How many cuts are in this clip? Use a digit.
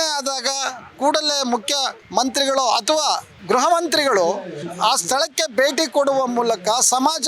2